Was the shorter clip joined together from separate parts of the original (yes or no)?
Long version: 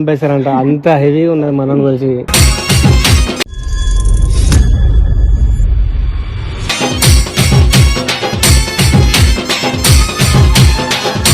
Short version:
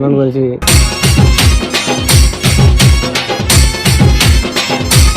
yes